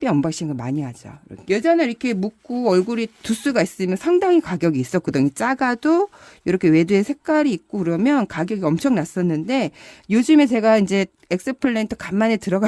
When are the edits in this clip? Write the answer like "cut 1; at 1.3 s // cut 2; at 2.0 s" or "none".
cut 1; at 1.3 s